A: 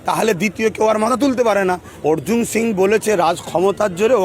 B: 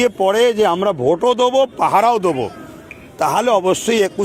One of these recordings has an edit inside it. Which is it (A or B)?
A